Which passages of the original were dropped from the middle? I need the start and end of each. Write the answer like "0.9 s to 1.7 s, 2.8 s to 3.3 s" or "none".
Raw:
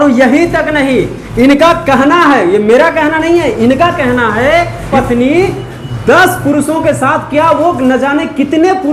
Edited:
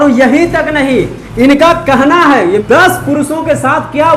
2.6 s to 6.0 s